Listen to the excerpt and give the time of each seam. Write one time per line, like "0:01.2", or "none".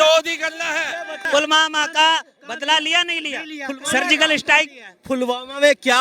0:01.1